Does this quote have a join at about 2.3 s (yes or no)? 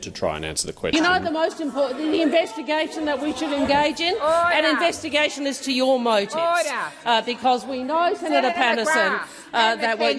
no